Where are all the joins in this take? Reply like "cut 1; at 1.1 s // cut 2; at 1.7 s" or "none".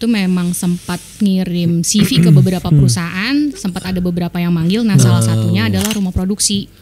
none